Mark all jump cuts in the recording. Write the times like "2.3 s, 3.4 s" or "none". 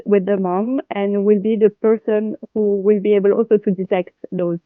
none